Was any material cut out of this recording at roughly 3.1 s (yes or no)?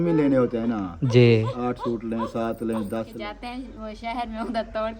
yes